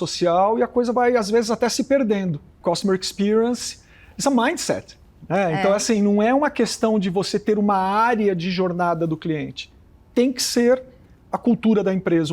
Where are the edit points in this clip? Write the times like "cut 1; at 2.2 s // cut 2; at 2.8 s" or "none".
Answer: cut 1; at 2.6 s